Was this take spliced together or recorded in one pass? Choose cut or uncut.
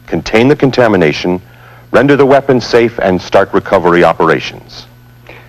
cut